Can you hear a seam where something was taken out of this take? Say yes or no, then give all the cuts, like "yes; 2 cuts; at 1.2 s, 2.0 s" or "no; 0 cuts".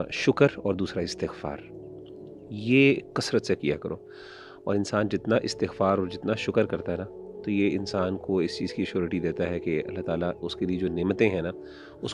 no; 0 cuts